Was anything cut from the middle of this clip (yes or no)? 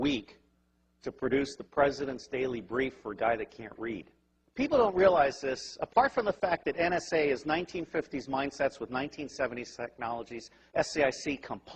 no